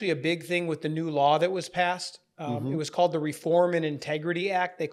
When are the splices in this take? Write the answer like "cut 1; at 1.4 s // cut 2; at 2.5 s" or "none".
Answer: none